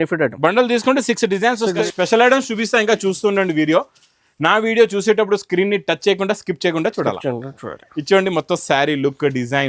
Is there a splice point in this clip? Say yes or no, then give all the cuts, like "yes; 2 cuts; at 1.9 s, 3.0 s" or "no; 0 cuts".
yes; 1 cut; at 1.9 s